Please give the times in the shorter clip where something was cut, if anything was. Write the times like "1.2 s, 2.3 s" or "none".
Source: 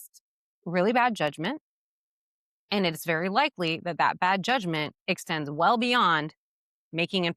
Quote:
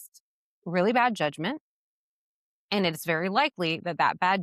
none